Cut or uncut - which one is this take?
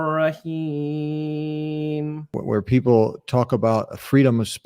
cut